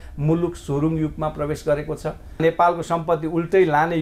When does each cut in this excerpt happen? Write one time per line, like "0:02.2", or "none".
0:02.4